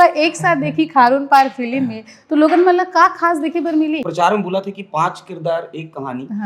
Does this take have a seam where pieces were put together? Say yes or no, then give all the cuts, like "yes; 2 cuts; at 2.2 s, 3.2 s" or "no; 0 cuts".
yes; 1 cut; at 4.1 s